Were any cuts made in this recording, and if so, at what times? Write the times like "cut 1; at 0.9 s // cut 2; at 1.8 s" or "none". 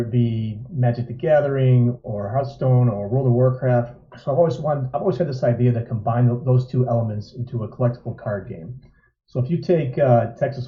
none

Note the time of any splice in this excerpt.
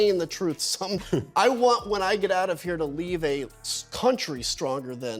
cut 1; at 1.0 s

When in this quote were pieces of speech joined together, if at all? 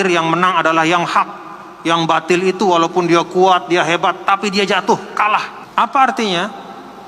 cut 1; at 5.6 s

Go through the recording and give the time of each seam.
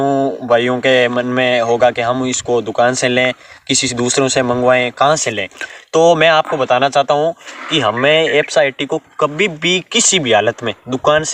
none

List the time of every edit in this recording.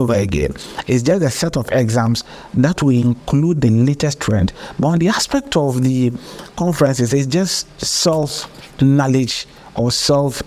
none

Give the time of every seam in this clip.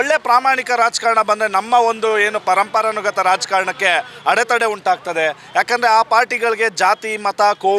none

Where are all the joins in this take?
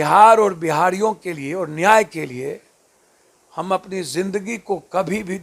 none

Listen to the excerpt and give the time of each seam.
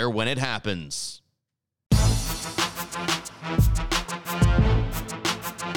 cut 1; at 1.9 s

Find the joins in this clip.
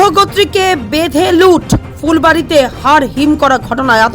none

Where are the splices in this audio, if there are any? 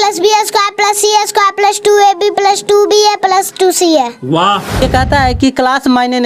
cut 1; at 4.8 s

